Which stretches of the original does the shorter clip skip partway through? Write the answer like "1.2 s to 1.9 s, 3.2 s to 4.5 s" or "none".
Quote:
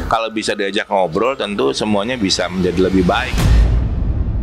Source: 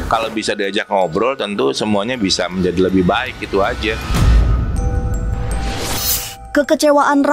3.3 s to 4.0 s